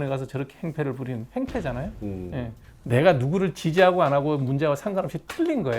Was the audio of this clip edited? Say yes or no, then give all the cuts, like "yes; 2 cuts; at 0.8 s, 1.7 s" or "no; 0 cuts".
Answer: yes; 1 cut; at 2.7 s